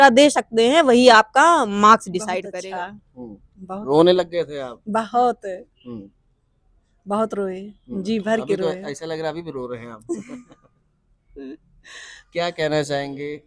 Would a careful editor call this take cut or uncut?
cut